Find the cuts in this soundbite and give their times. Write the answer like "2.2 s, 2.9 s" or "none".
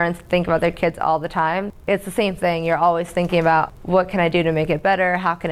1.7 s, 3.7 s